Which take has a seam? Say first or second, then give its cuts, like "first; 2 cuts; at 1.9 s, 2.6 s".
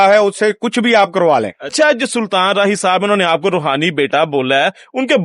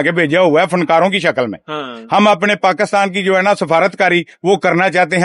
first; 1 cut; at 1.6 s